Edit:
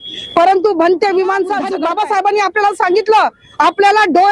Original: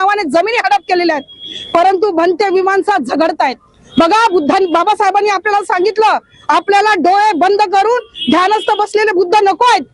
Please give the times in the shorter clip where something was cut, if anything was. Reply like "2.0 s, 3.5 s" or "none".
1.7 s

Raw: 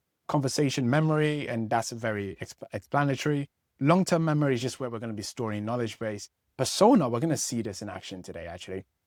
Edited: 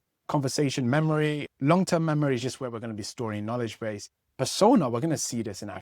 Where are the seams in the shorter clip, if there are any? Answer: 1.5 s

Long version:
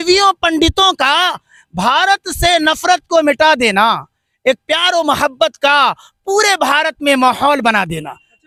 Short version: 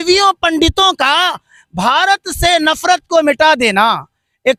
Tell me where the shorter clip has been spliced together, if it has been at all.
none

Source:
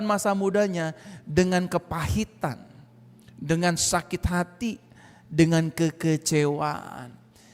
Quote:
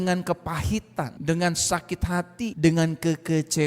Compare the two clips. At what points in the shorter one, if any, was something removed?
1.1 s, 2.5 s

